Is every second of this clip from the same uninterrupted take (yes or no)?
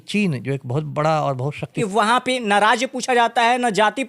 no